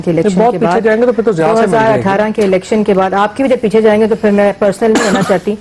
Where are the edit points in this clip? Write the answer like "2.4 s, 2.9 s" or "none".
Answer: none